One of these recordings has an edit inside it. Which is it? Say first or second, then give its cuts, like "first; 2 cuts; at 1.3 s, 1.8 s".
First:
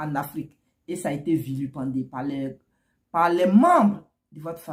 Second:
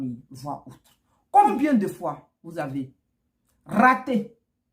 second; 1 cut; at 1.5 s